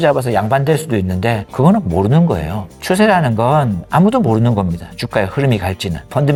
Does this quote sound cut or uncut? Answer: uncut